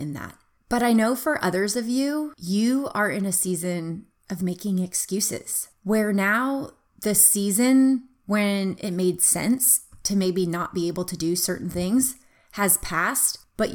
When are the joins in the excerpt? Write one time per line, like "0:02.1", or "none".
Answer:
none